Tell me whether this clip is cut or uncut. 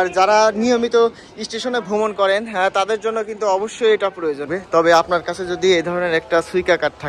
cut